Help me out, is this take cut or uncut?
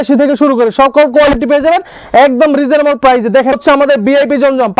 cut